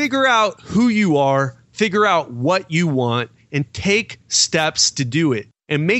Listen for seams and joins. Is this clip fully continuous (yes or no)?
yes